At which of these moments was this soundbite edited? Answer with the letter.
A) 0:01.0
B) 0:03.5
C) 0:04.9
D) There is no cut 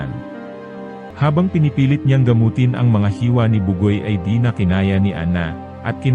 A